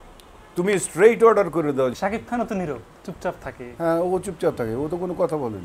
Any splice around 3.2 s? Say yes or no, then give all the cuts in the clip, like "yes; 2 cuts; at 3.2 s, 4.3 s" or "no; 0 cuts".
no; 1 cut; at 2.0 s